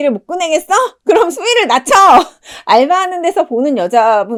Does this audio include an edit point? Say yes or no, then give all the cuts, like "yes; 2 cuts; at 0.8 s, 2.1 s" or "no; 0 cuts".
no; 0 cuts